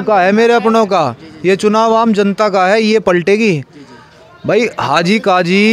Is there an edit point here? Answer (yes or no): no